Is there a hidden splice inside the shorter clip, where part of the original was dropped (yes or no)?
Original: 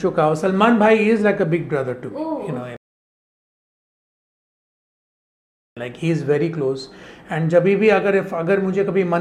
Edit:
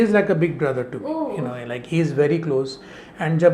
yes